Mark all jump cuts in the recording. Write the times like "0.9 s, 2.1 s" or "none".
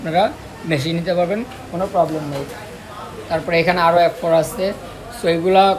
none